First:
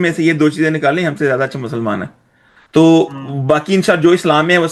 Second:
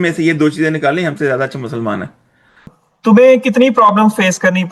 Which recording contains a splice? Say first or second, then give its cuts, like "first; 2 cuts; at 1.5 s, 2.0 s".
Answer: second; 1 cut; at 2.5 s